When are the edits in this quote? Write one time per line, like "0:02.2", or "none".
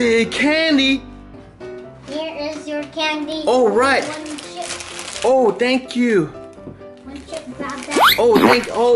0:01.4